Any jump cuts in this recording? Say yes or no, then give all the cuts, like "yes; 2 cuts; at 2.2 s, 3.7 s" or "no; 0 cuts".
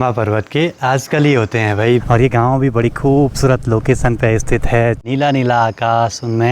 yes; 2 cuts; at 2.0 s, 5.0 s